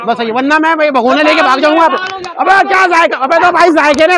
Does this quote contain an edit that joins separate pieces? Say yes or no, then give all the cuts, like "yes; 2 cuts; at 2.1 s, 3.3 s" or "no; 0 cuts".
no; 0 cuts